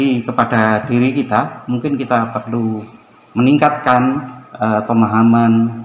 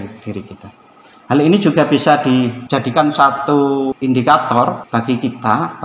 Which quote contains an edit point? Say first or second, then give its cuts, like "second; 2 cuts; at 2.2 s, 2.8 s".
second; 3 cuts; at 2.6 s, 4.0 s, 4.8 s